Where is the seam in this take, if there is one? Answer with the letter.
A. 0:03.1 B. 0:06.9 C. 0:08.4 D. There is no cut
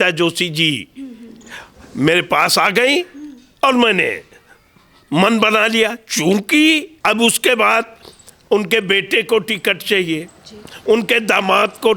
B